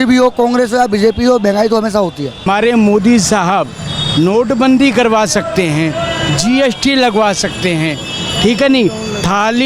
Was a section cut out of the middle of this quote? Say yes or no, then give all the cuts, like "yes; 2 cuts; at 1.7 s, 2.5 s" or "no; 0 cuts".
yes; 1 cut; at 2.5 s